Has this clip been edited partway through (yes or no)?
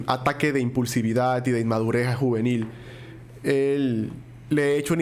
no